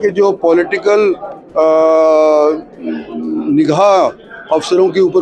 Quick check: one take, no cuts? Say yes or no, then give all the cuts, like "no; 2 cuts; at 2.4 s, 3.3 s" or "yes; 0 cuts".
yes; 0 cuts